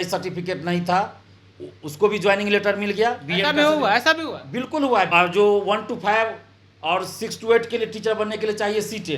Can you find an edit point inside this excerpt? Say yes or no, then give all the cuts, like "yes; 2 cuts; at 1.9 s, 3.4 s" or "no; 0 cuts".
yes; 1 cut; at 5.1 s